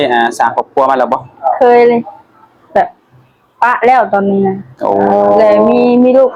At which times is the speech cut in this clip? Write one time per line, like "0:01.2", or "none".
none

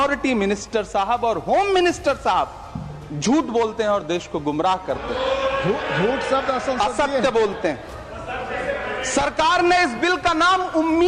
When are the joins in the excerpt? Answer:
none

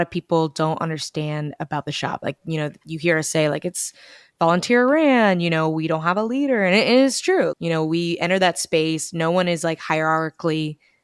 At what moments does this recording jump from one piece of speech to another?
none

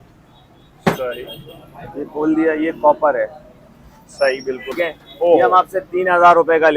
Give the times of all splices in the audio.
0:04.7

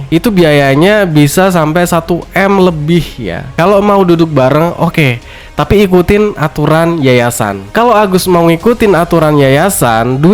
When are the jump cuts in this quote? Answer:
0:03.5

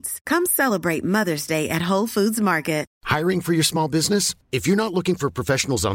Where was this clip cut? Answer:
0:02.9

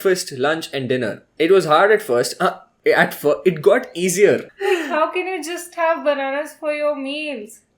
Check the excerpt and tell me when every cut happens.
0:01.2
0:04.5

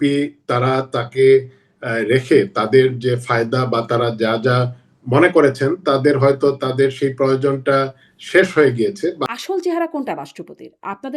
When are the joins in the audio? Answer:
0:09.3

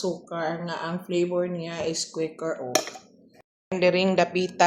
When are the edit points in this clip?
0:03.4

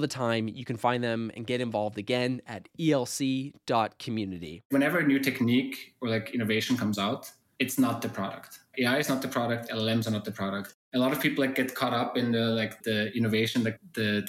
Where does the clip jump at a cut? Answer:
0:04.7
0:08.7

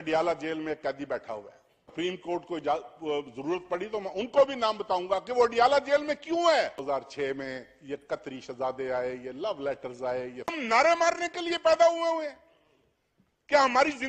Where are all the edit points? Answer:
0:01.9
0:06.8
0:10.6

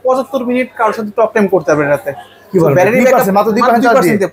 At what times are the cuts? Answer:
none

